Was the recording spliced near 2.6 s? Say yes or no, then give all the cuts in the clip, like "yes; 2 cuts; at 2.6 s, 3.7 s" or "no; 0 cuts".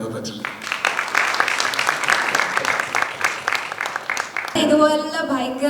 no; 1 cut; at 4.5 s